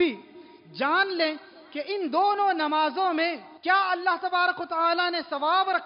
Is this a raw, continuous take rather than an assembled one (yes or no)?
no